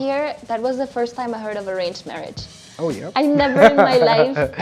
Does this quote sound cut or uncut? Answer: uncut